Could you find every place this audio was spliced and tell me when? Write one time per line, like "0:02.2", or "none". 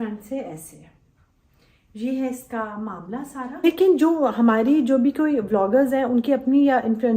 0:03.6